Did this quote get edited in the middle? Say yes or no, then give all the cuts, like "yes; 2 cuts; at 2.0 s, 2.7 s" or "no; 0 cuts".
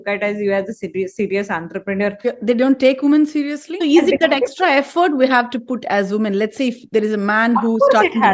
yes; 2 cuts; at 2.3 s, 3.6 s